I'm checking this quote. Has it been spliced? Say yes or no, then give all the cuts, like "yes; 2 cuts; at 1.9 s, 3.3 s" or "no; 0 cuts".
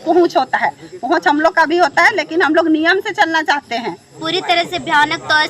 yes; 1 cut; at 4.2 s